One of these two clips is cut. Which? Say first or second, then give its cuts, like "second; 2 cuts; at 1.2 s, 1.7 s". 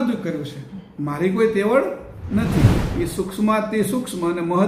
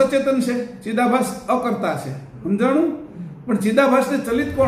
first; 1 cut; at 2.8 s